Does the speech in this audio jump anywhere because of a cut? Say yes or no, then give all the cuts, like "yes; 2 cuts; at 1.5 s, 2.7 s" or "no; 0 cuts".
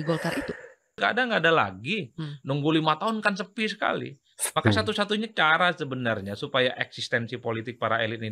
yes; 1 cut; at 1.0 s